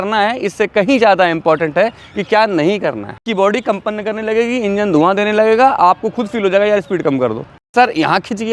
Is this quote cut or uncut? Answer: cut